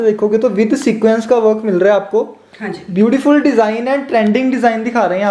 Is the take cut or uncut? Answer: uncut